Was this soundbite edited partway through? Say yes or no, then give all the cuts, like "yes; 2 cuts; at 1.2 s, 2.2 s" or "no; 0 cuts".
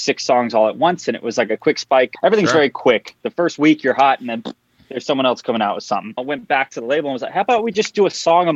yes; 3 cuts; at 2.1 s, 3.2 s, 6.2 s